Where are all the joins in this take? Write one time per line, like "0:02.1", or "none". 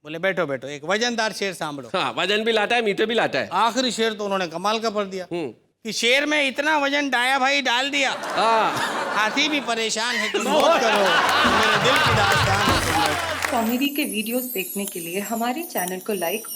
0:13.4